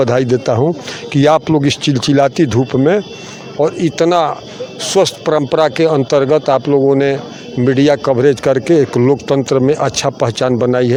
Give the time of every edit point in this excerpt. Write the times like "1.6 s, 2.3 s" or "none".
none